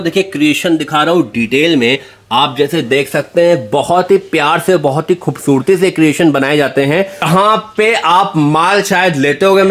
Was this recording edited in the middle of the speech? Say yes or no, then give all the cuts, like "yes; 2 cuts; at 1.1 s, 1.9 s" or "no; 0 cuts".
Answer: yes; 1 cut; at 7.3 s